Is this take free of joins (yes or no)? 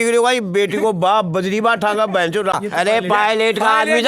no